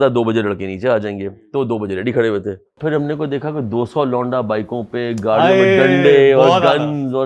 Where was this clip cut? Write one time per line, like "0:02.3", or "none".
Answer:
0:02.8